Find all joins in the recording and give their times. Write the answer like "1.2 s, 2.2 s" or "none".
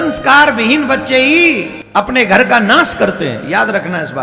1.7 s